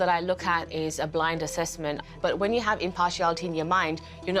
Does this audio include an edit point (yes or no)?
yes